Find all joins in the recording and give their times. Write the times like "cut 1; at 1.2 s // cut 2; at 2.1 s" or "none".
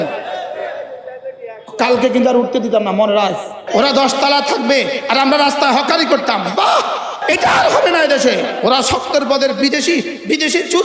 cut 1; at 3.6 s // cut 2; at 7.2 s // cut 3; at 8.5 s